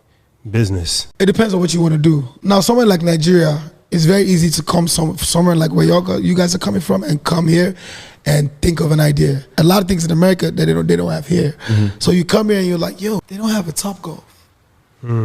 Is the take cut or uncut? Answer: cut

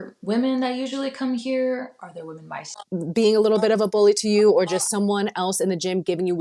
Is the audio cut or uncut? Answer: cut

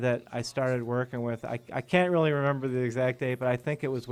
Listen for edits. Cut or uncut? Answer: uncut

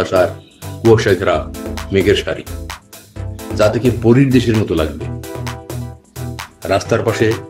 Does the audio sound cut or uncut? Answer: uncut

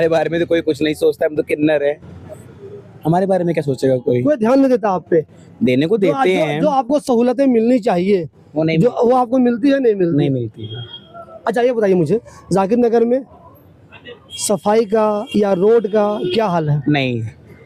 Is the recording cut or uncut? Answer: uncut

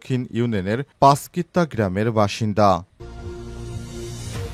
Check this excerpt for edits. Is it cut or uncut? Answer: cut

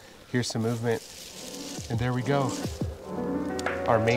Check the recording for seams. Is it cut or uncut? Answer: uncut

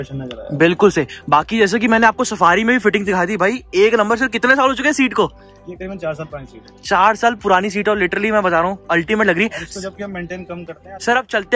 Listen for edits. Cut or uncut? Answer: uncut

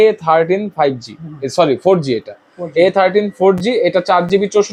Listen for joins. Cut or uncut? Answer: uncut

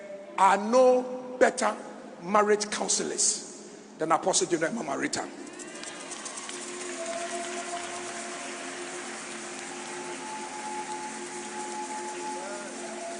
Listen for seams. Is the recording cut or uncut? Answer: uncut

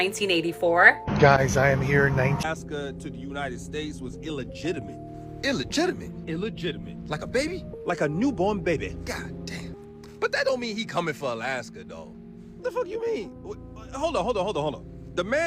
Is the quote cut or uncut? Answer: cut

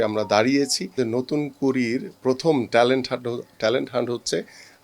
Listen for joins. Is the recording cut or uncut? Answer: cut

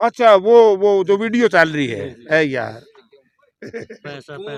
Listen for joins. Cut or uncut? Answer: uncut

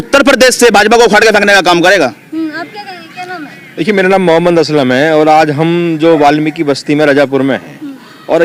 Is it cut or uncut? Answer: uncut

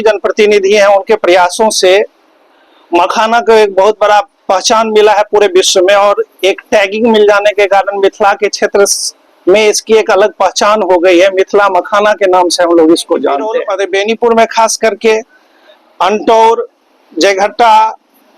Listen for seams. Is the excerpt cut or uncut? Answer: cut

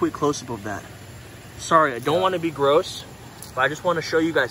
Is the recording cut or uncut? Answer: uncut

